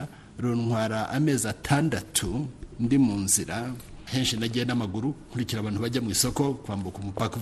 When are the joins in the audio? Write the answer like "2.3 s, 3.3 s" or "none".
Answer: 4.0 s